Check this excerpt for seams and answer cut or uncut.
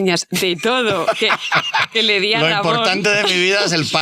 uncut